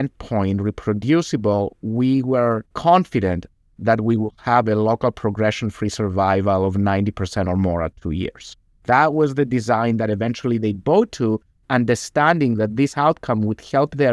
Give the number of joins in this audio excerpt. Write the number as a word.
zero